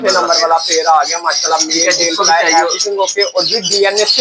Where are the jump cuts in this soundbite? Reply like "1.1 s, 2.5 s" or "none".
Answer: none